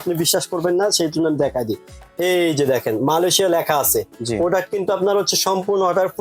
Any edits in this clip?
no; 0 cuts

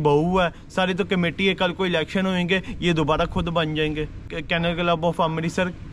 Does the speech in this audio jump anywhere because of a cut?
yes; 1 cut; at 4.3 s

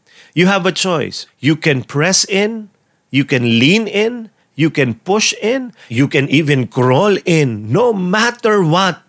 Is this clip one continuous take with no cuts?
no; 2 cuts; at 1.2 s, 5.8 s

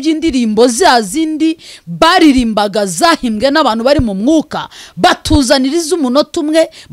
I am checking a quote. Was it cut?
no; 0 cuts

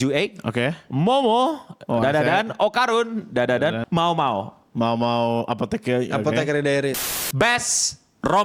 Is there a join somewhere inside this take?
yes; 2 cuts; at 3.8 s, 7.1 s

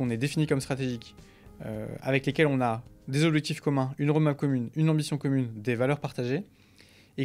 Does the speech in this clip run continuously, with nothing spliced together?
yes; 0 cuts

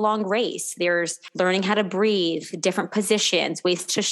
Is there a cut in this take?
yes; 1 cut; at 1.2 s

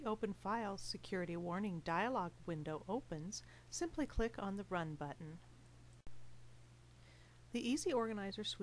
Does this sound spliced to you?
yes; 1 cut; at 6.1 s

